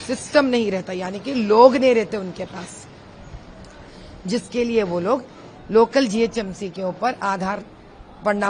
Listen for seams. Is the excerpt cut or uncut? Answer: uncut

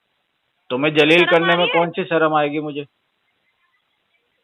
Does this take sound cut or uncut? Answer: uncut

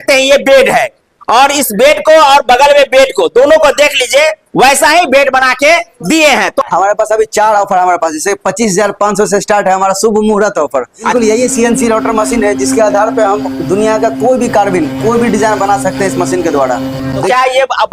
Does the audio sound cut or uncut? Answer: cut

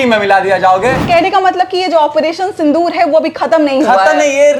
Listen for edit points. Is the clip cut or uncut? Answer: cut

